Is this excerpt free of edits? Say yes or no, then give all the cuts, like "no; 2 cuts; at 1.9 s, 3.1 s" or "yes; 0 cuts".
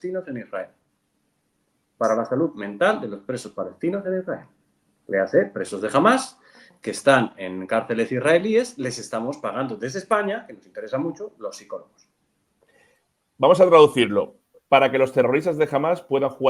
yes; 0 cuts